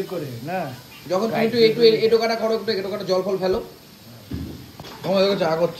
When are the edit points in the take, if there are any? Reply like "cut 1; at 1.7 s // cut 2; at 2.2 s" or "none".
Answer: cut 1; at 4.9 s